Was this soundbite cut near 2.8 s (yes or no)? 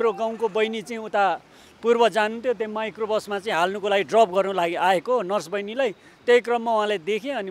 no